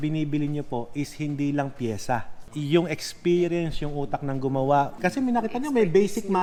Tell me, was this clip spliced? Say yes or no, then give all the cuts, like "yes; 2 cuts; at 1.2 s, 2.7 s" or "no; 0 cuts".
no; 0 cuts